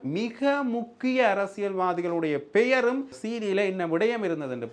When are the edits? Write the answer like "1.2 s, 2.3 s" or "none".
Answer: 3.2 s